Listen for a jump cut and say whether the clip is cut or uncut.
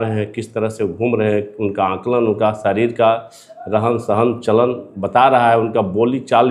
uncut